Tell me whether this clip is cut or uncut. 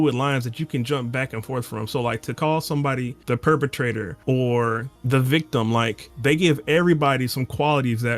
cut